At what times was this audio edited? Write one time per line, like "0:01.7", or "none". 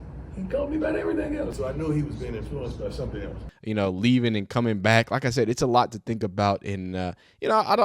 0:01.5
0:03.5